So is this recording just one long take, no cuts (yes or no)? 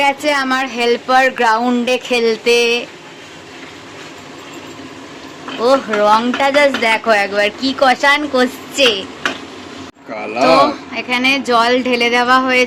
yes